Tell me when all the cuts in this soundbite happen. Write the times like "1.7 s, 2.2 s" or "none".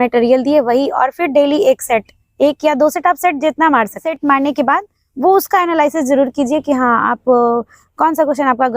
4.1 s